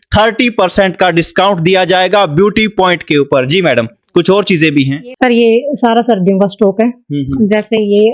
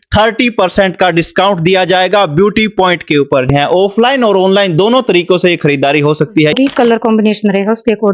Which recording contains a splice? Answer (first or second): second